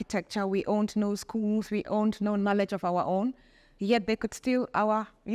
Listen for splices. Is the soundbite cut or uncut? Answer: uncut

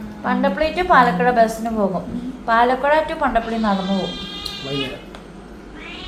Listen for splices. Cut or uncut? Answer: uncut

